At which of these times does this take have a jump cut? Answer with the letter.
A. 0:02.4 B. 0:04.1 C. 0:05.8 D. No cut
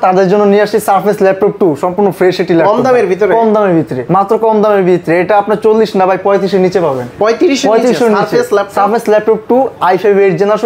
D